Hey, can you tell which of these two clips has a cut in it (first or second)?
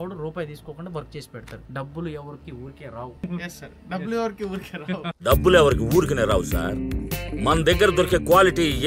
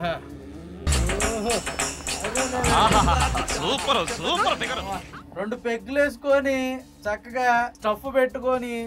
first